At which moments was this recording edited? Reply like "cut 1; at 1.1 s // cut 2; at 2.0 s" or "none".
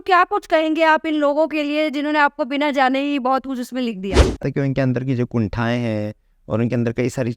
cut 1; at 4.4 s

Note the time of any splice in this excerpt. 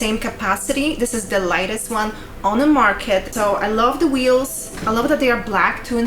cut 1; at 3.3 s

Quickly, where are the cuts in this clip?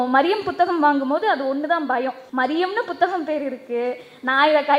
cut 1; at 2.2 s

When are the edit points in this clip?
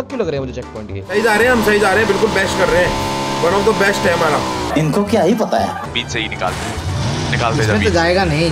none

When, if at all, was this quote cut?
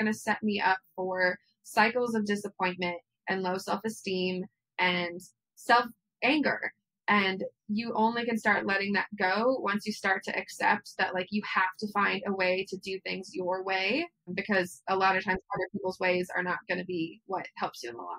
cut 1; at 17.2 s

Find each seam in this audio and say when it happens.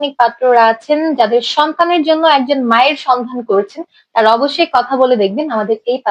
none

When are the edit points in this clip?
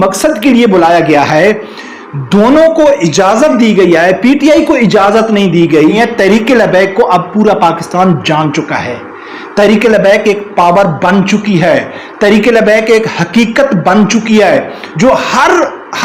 cut 1; at 6.0 s

